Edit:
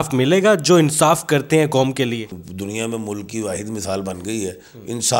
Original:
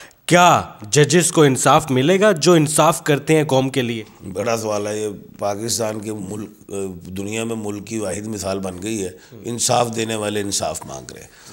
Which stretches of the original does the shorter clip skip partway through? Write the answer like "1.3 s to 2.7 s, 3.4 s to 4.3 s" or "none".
4.2 s to 7.0 s